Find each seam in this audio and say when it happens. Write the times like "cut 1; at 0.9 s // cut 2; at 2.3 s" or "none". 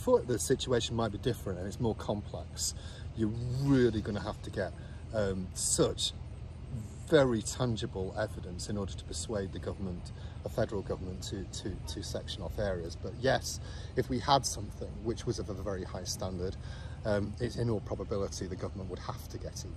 none